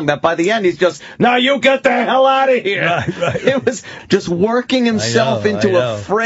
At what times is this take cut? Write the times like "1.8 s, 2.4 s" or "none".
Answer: 3.9 s